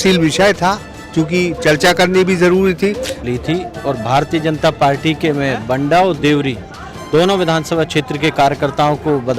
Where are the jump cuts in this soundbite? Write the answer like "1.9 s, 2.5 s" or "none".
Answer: 3.2 s